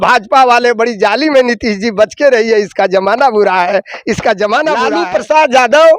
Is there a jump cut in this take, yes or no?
yes